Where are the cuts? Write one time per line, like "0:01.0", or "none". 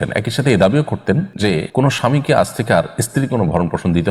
0:01.5